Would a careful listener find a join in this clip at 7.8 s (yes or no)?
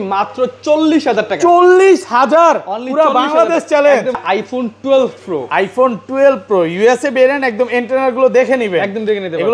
no